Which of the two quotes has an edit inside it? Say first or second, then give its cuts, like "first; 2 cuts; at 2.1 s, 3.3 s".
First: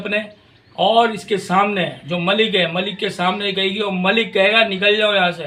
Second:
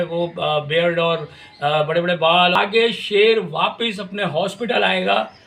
second; 1 cut; at 2.5 s